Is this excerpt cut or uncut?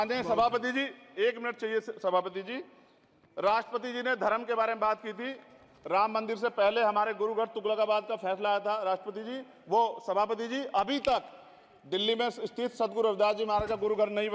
uncut